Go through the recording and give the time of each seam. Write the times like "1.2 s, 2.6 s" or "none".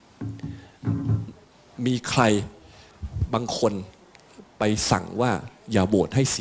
none